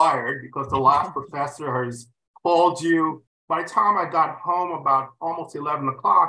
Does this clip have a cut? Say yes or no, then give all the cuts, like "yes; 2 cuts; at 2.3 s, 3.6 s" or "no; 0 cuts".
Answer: yes; 1 cut; at 3.3 s